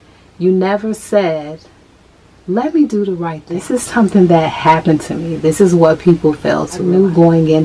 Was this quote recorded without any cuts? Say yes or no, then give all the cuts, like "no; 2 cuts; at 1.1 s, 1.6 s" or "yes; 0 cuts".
no; 2 cuts; at 3.8 s, 6.9 s